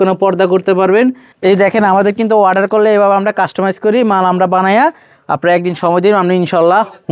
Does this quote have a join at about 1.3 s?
yes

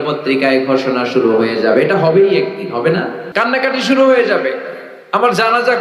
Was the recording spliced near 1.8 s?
no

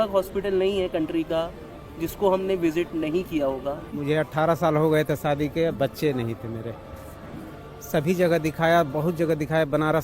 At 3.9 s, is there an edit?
yes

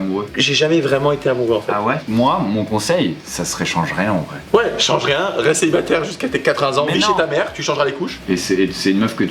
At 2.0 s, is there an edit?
yes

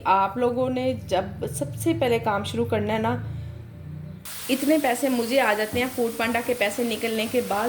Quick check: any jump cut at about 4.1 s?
yes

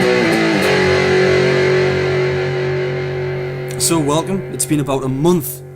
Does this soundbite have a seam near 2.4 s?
no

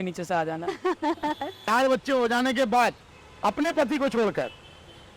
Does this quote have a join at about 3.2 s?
no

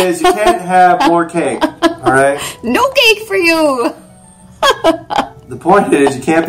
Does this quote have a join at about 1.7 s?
no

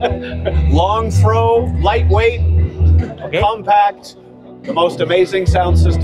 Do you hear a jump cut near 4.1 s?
no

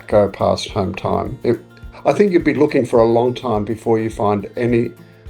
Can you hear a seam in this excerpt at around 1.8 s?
yes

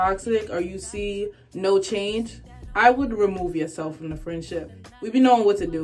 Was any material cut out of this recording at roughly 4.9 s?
yes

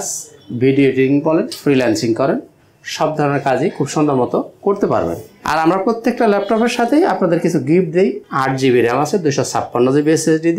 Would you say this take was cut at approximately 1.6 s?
no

